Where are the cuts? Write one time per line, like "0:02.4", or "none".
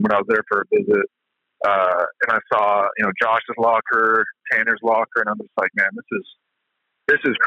none